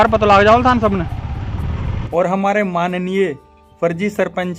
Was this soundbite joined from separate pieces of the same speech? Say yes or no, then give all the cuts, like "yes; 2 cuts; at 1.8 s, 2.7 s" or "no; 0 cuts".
yes; 1 cut; at 1.9 s